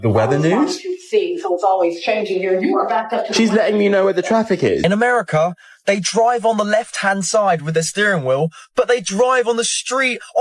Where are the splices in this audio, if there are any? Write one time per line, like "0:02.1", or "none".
0:04.8